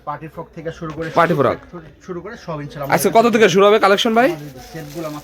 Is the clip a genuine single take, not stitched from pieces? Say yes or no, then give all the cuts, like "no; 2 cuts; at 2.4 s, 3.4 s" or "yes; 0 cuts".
yes; 0 cuts